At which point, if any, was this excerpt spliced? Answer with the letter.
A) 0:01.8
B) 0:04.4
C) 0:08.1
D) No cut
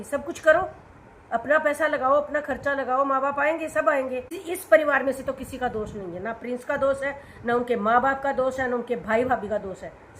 B